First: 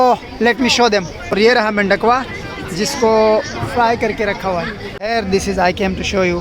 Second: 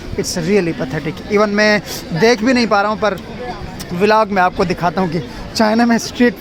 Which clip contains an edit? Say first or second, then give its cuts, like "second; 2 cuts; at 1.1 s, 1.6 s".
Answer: first; 2 cuts; at 1.3 s, 4.9 s